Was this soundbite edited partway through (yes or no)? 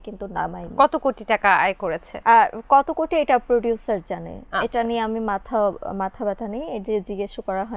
no